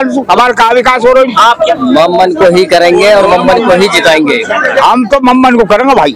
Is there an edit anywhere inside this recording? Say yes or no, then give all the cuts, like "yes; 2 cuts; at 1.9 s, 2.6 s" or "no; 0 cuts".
yes; 2 cuts; at 1.7 s, 4.7 s